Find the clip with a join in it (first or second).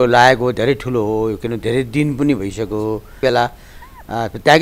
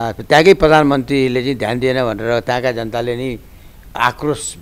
first